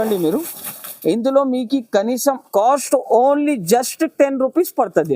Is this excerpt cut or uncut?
cut